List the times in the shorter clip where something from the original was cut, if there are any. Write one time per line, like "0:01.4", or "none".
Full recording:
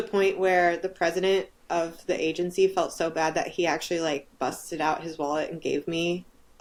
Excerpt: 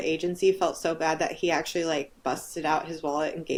none